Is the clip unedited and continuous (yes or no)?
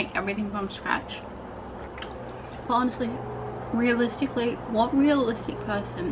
yes